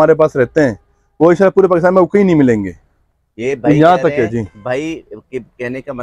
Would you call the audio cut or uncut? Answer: uncut